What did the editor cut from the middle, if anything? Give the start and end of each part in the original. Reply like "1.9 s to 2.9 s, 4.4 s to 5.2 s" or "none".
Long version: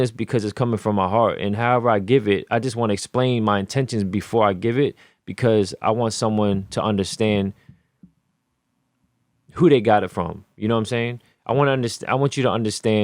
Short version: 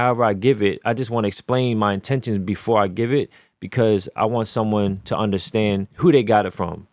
7.6 s to 9.5 s

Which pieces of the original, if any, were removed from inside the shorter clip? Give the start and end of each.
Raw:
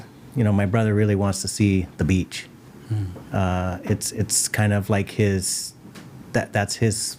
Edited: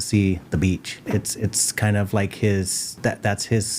2.5 s to 3.8 s, 5.6 s to 6.1 s

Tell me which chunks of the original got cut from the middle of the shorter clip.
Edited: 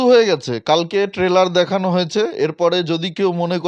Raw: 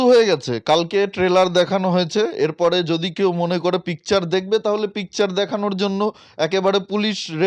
none

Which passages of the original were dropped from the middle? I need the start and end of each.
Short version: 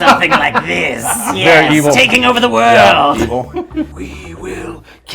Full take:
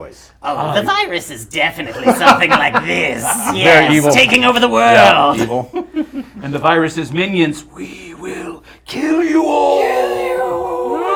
6.2 s to 7.8 s

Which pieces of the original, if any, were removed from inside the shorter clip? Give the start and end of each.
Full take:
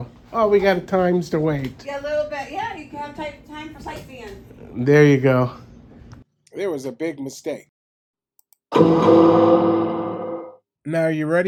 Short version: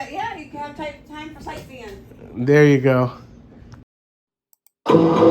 6.3 s to 7.8 s

